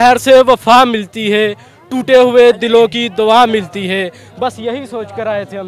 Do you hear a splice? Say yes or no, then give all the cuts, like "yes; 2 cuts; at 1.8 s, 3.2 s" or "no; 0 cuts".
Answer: no; 0 cuts